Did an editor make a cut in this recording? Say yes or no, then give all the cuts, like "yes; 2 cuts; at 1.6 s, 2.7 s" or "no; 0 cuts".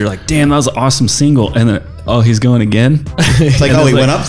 no; 0 cuts